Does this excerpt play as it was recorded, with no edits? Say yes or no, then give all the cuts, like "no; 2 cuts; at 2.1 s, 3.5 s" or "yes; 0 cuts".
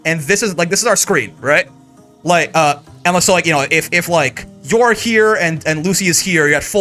yes; 0 cuts